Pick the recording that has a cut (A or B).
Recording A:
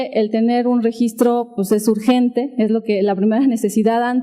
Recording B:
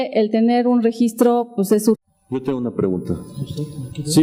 A